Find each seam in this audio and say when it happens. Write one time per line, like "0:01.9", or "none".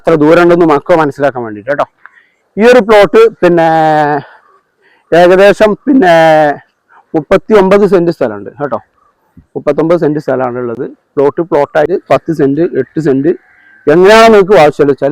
0:11.9